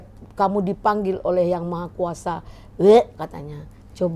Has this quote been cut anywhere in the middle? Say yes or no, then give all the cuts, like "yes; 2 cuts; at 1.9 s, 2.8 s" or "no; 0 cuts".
no; 0 cuts